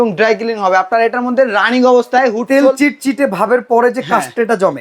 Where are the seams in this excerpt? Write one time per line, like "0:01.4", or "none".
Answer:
none